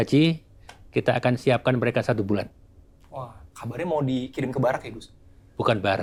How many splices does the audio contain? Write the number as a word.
zero